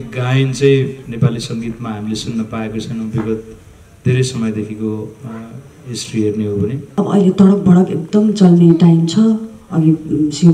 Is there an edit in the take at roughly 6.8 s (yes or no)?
yes